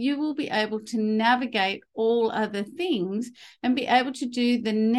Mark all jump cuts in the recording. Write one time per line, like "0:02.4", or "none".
none